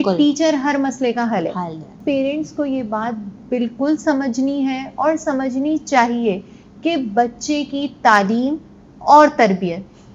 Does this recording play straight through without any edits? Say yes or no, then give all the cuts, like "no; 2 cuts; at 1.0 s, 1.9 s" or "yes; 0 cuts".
no; 1 cut; at 1.9 s